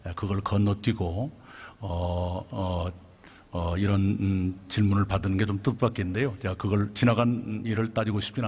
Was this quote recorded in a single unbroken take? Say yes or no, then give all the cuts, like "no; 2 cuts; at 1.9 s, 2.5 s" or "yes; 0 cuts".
yes; 0 cuts